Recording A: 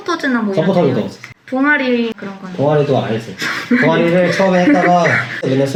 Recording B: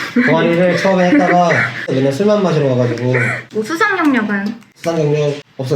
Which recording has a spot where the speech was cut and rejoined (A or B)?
B